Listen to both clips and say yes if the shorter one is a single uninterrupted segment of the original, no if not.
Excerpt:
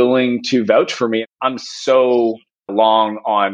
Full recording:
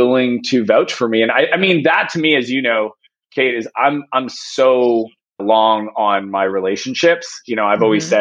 no